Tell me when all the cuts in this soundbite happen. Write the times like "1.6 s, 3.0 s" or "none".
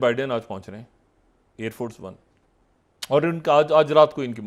2.3 s